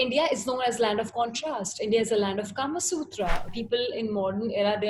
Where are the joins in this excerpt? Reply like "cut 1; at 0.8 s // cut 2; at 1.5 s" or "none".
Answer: cut 1; at 3.5 s